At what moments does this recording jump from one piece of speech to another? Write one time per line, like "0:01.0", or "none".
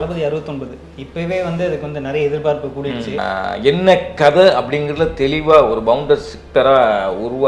0:03.2